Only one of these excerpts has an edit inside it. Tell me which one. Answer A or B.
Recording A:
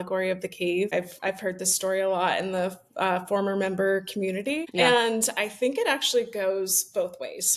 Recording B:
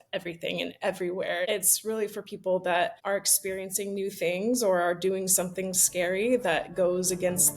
B